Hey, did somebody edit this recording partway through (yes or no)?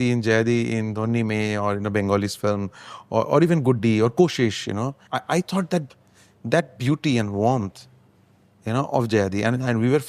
no